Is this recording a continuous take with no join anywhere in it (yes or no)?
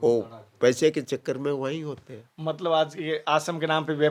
yes